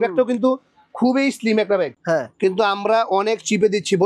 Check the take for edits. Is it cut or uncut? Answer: cut